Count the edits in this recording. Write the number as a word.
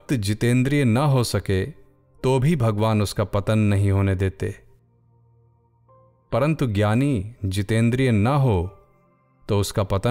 zero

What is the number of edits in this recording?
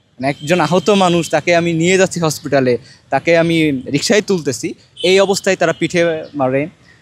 zero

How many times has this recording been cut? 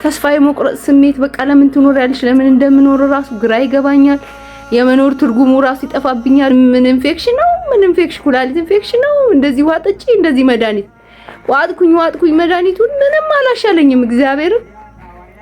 one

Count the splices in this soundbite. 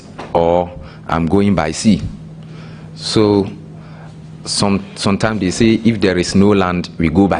zero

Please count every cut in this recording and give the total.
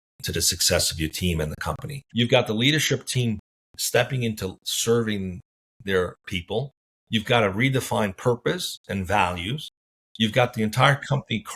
one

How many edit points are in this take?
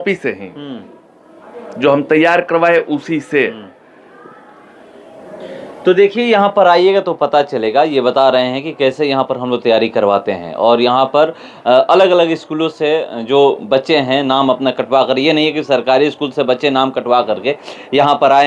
zero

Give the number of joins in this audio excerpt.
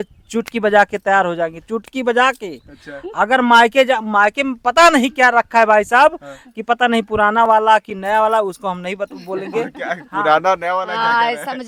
zero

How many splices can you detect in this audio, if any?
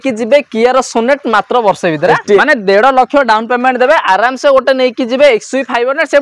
one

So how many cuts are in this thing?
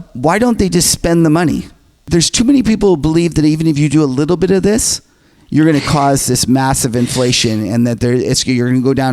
one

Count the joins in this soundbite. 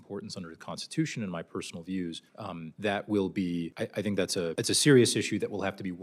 three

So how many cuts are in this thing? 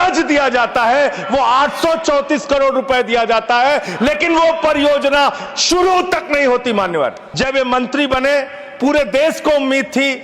one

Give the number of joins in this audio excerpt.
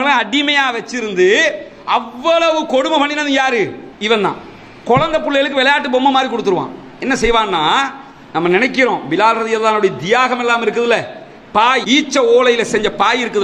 zero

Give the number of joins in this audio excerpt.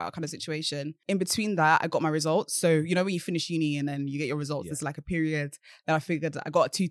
one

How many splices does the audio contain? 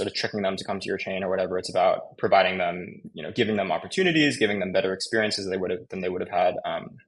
zero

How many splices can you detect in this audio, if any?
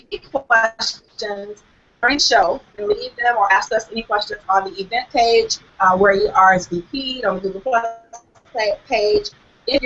one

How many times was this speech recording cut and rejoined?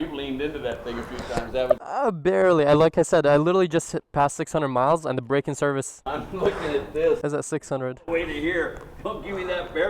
zero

